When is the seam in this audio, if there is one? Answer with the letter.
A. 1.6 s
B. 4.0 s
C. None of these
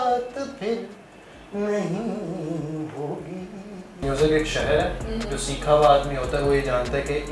B